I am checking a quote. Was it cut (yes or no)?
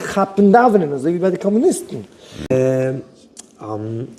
yes